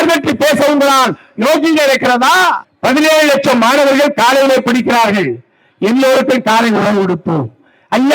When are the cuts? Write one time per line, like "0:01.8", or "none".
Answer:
0:02.7